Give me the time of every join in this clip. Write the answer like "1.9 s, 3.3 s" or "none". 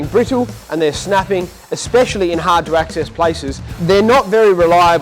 3.7 s